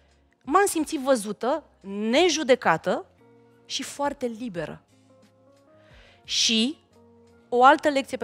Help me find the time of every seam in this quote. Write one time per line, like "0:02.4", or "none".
none